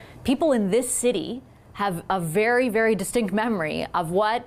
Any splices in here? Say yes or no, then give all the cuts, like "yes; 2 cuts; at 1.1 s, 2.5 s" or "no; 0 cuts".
no; 0 cuts